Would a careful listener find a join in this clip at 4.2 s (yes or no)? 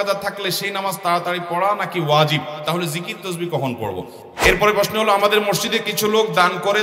yes